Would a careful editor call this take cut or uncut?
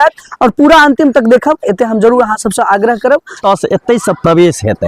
cut